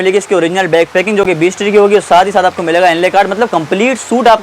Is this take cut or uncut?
uncut